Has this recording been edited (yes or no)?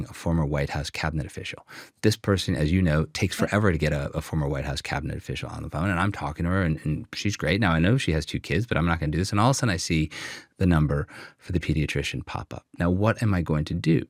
no